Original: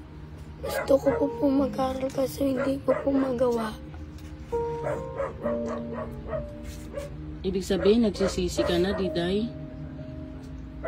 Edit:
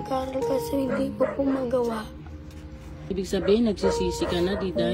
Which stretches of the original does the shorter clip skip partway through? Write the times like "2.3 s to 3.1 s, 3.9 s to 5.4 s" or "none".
4.4 s to 7.1 s